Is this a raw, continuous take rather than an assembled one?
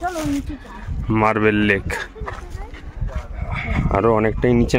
yes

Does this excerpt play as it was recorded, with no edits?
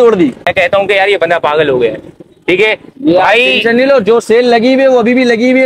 yes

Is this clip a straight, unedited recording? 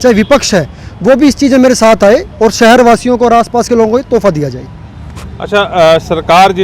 yes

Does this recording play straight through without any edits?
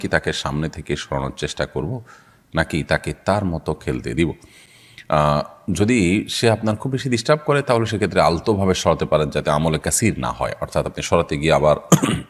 yes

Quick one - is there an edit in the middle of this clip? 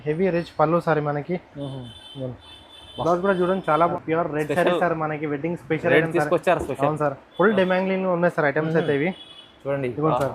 yes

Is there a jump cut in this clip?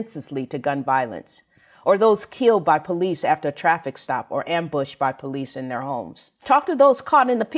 no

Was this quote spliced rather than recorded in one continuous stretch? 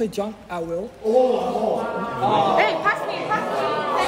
no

